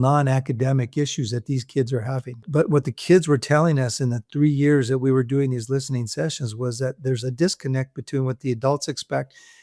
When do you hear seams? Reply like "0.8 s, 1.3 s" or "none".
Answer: 2.4 s